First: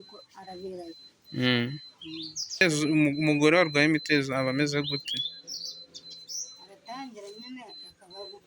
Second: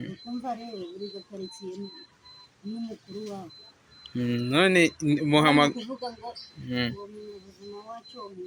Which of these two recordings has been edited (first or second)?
first